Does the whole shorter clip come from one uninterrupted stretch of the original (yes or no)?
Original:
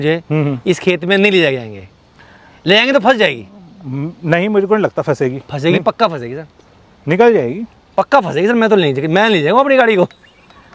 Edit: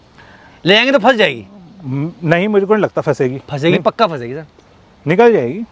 yes